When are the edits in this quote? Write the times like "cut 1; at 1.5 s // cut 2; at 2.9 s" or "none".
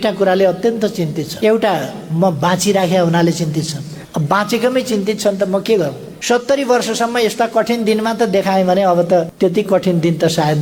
cut 1; at 1.2 s // cut 2; at 3.9 s // cut 3; at 6.2 s // cut 4; at 9.3 s